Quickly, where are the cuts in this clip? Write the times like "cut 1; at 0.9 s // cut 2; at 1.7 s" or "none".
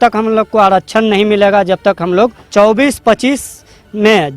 cut 1; at 2.4 s